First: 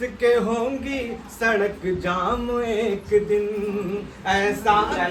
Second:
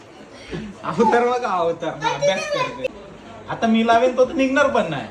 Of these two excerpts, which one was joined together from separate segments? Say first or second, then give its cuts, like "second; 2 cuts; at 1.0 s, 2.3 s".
second; 1 cut; at 3.1 s